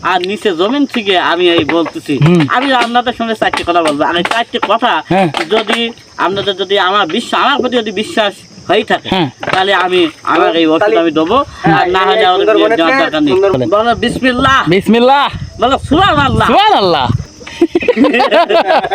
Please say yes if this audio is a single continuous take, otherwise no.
no